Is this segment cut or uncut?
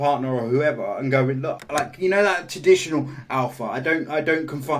cut